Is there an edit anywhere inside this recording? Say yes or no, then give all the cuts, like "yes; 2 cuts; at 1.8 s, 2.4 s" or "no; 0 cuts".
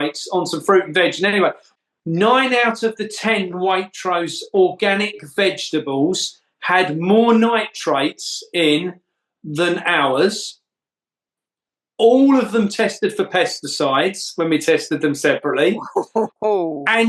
yes; 1 cut; at 1.6 s